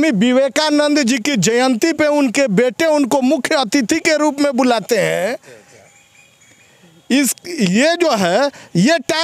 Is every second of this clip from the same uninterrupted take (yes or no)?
yes